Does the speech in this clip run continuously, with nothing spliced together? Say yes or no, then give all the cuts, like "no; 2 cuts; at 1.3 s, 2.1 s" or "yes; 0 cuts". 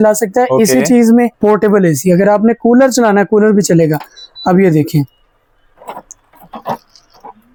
yes; 0 cuts